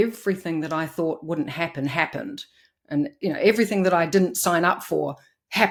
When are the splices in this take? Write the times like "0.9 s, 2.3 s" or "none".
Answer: none